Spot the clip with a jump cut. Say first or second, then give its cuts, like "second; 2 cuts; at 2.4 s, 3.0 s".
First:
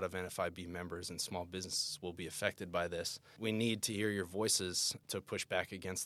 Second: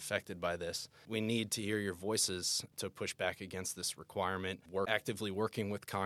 second; 1 cut; at 4.8 s